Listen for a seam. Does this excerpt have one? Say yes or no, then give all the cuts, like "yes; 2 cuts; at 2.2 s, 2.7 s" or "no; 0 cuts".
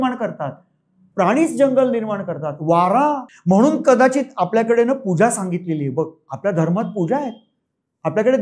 yes; 1 cut; at 3.3 s